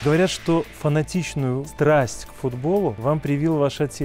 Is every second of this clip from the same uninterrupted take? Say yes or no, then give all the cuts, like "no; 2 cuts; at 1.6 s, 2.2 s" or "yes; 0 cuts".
no; 2 cuts; at 1.7 s, 3.0 s